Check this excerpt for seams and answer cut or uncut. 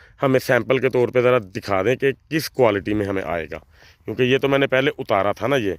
uncut